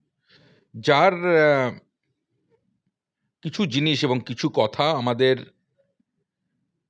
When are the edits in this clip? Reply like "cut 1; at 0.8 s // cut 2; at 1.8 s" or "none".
none